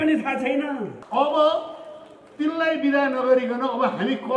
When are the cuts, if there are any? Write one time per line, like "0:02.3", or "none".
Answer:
0:01.0